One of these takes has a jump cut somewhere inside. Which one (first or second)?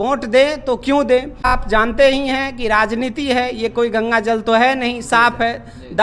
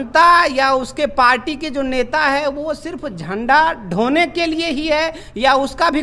first